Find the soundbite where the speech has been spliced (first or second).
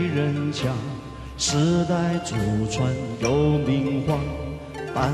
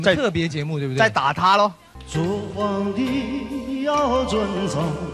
second